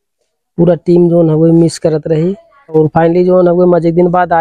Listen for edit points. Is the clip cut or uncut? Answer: cut